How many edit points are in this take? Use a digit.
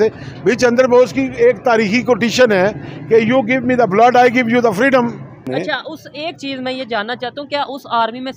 1